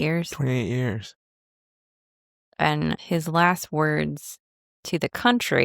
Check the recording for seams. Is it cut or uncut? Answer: cut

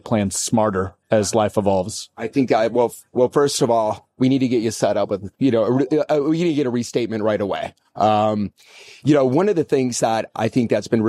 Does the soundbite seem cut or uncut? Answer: uncut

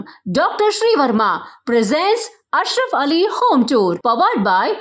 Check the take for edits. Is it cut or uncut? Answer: uncut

